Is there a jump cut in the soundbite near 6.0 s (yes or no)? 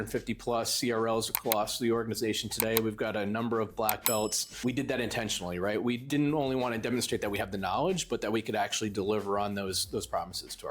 yes